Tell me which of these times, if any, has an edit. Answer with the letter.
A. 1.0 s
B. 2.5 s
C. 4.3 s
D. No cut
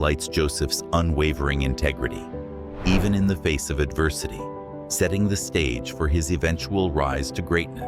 D